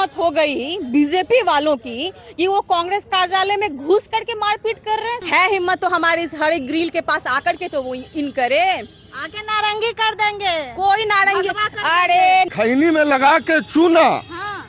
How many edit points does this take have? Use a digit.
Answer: 2